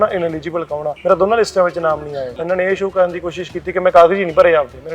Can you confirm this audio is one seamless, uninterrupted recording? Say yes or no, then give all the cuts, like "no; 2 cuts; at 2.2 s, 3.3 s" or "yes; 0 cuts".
no; 2 cuts; at 0.9 s, 2.3 s